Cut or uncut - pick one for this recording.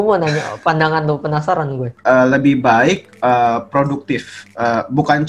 cut